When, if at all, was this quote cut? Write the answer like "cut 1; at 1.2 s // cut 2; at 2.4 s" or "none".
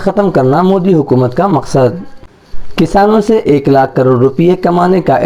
none